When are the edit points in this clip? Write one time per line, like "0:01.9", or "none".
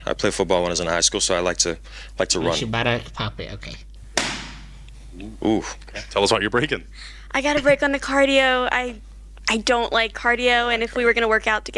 none